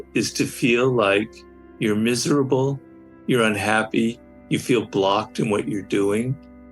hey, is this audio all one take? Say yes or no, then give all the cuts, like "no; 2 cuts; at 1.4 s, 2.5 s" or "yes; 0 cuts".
yes; 0 cuts